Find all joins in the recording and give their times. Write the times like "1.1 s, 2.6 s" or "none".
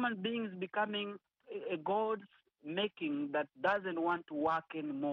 1.4 s